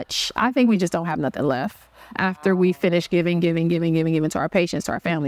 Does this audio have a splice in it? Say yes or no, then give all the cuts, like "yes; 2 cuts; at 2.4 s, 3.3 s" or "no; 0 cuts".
no; 0 cuts